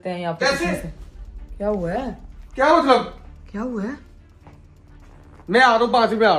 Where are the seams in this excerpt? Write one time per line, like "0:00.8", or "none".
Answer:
none